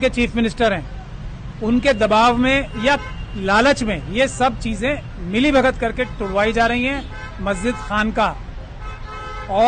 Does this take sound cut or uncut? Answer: uncut